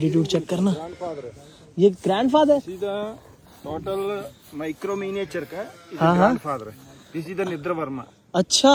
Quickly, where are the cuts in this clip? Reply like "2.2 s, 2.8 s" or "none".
none